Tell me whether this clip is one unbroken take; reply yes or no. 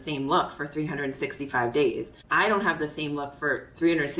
no